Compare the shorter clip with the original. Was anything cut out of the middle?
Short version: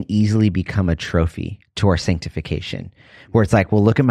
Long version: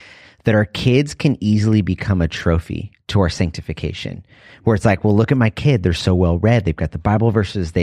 no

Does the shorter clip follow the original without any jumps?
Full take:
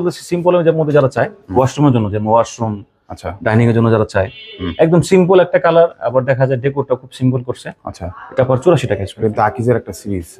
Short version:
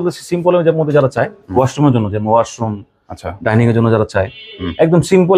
yes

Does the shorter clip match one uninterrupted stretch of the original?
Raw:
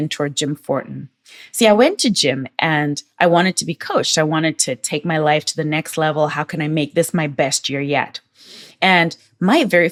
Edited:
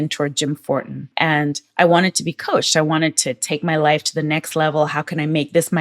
no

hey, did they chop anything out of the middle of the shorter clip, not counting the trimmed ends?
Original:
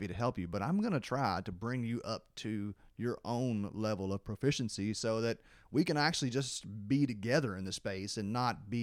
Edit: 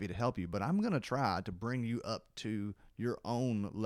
no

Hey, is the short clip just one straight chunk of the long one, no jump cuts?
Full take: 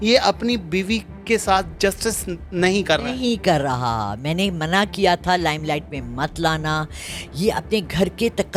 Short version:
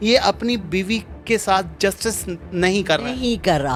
yes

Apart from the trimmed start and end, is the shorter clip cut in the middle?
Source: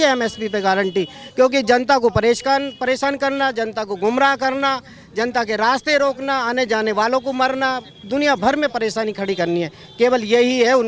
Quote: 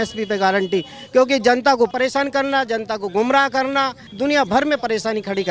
yes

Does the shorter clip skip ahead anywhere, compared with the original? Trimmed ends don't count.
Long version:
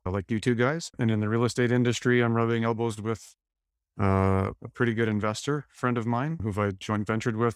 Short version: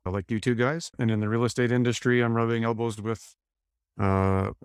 no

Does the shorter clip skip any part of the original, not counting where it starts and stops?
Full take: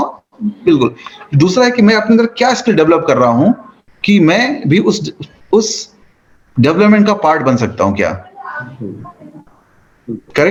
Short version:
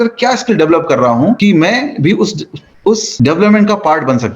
yes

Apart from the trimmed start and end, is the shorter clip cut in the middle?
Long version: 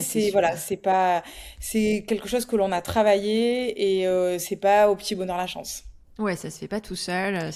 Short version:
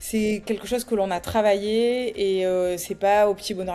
no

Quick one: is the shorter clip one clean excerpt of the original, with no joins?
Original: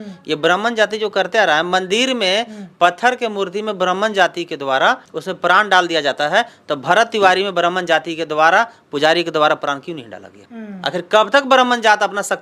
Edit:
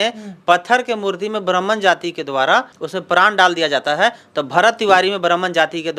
yes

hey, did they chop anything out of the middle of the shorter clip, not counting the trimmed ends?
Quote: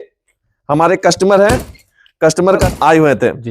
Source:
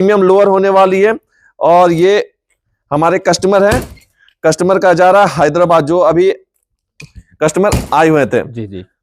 yes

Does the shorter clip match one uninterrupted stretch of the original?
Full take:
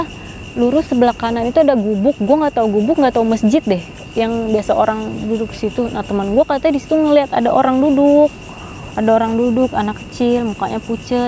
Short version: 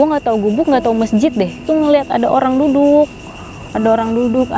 no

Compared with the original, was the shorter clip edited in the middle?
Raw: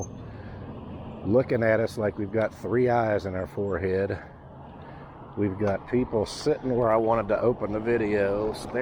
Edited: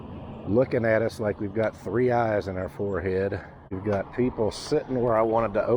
yes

